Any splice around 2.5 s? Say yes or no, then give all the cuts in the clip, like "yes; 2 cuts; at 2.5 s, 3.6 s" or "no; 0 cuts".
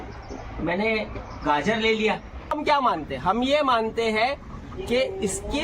yes; 1 cut; at 2.5 s